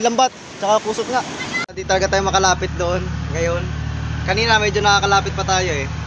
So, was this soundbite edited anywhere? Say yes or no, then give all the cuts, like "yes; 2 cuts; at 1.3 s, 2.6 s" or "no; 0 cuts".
yes; 1 cut; at 1.6 s